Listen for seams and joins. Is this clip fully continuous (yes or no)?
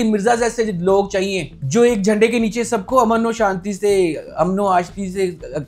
yes